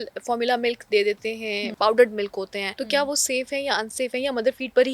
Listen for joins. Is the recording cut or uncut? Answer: cut